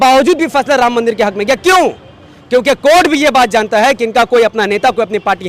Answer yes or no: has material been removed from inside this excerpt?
no